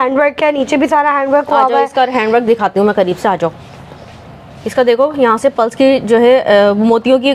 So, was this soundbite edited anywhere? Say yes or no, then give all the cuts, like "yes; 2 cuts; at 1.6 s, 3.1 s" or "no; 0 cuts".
no; 0 cuts